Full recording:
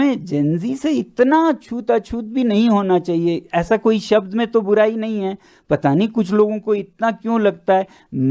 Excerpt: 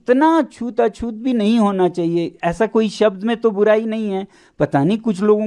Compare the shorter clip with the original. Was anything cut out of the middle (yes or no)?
no